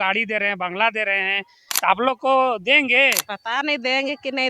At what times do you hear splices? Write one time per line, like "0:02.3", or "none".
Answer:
0:03.3